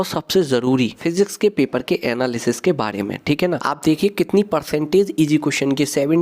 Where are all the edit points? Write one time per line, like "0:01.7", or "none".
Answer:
0:01.0
0:04.2